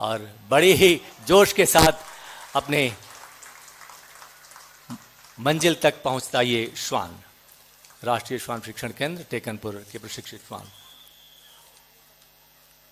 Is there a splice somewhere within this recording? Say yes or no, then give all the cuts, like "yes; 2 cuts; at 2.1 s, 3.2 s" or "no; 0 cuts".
no; 0 cuts